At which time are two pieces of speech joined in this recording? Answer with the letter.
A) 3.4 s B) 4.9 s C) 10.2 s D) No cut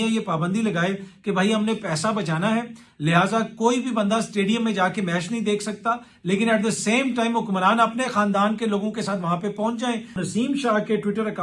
C